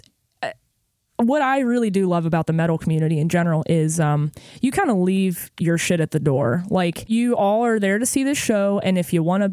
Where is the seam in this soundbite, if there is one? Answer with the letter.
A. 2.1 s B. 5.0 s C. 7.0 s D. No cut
C